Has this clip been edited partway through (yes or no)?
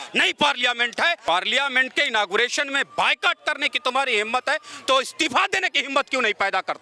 yes